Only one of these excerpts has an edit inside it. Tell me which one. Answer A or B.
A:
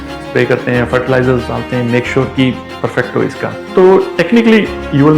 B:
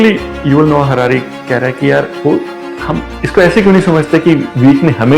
A